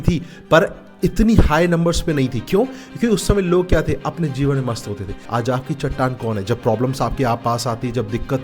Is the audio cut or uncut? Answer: cut